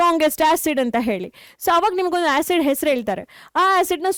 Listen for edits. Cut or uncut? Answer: uncut